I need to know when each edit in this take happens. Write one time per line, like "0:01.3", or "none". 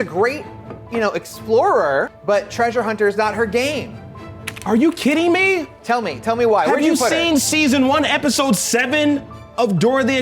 0:02.2